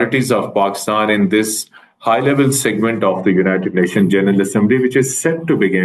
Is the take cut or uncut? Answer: uncut